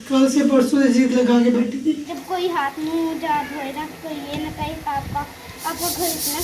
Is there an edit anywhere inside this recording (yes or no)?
yes